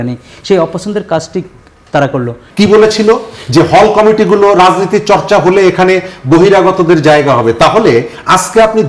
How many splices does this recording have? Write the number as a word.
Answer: one